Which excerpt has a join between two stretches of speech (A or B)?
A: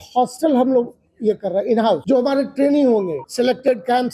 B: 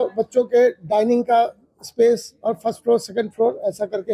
A